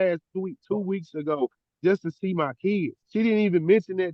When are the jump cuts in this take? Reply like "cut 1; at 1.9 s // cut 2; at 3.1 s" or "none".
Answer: cut 1; at 3.0 s